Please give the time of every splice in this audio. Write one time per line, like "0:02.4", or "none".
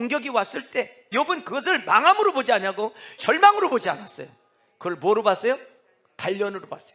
0:01.1
0:03.2